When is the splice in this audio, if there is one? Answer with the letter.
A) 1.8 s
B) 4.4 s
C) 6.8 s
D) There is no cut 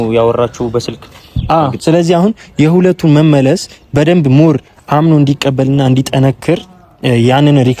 A